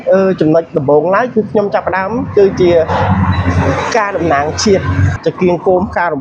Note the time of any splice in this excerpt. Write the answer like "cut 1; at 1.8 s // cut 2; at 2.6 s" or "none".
cut 1; at 5.0 s